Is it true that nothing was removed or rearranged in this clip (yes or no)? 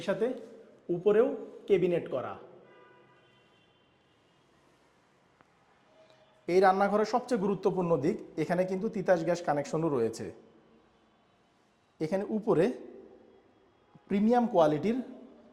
yes